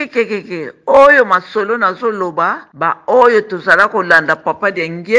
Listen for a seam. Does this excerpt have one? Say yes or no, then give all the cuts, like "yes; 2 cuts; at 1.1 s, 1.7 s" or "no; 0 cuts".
yes; 1 cut; at 2.7 s